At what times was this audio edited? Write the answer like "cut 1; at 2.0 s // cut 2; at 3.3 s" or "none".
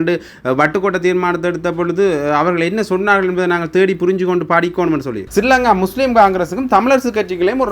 cut 1; at 5.2 s